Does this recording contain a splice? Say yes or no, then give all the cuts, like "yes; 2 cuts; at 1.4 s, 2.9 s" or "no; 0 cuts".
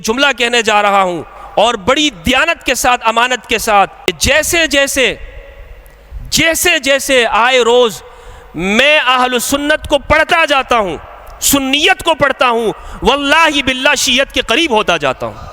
yes; 1 cut; at 4.0 s